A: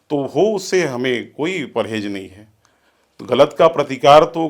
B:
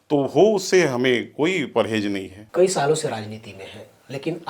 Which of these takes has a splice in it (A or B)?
B